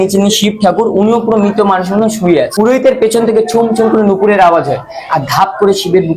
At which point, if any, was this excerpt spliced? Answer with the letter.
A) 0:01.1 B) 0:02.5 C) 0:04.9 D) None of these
B